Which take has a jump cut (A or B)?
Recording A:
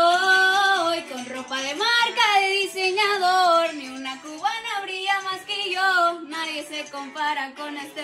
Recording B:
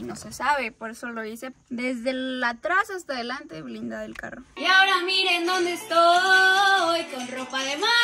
B